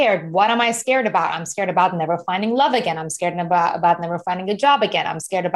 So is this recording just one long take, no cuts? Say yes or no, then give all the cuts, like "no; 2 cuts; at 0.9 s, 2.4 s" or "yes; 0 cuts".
yes; 0 cuts